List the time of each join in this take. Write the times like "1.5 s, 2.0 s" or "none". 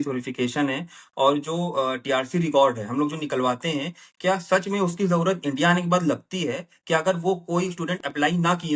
none